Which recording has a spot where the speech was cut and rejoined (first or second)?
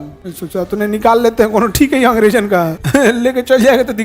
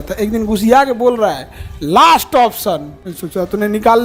first